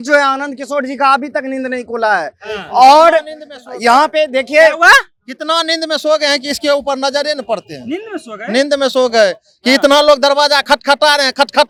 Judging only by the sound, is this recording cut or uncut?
uncut